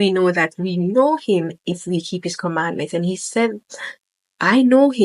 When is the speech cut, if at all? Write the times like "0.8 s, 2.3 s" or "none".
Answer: none